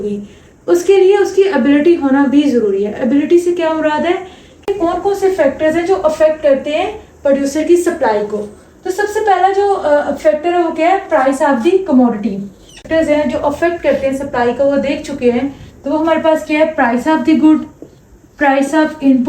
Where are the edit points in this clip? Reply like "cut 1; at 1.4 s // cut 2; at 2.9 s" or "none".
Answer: cut 1; at 4.7 s // cut 2; at 12.9 s